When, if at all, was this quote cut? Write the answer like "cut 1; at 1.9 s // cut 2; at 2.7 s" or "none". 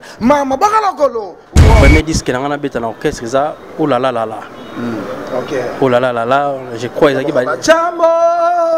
cut 1; at 1.8 s